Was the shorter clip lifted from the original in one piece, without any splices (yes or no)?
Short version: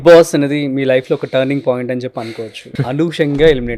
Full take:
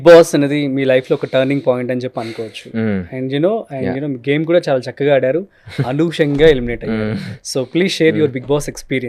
no